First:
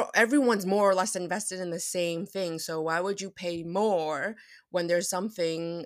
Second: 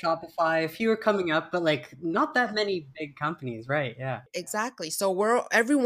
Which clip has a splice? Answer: second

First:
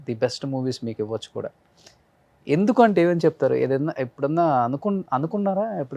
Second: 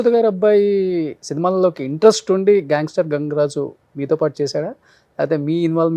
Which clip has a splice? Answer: second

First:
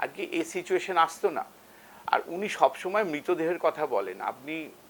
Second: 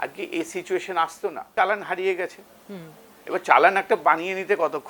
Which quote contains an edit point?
second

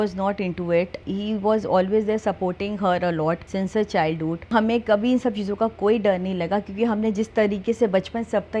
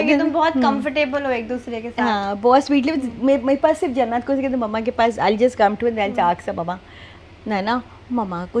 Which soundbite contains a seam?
first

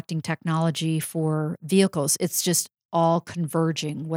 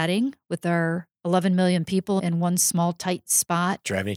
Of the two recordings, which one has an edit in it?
second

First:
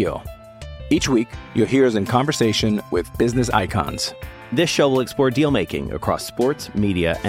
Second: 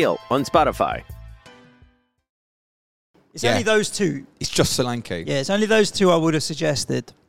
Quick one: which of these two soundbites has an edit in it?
second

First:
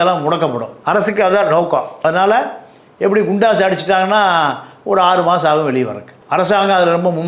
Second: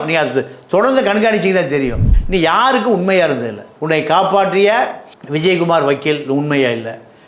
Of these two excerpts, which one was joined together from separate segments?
second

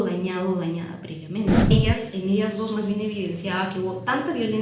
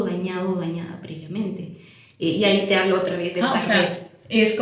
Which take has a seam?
first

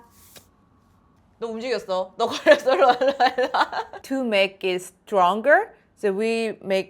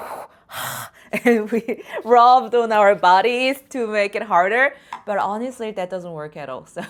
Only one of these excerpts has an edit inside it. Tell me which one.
first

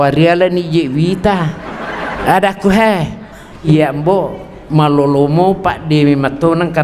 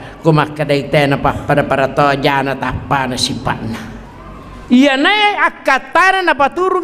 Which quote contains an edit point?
first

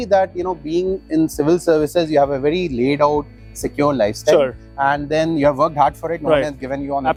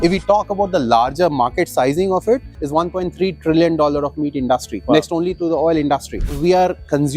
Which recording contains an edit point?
second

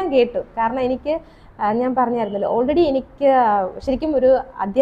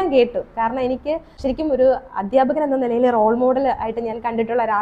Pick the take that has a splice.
second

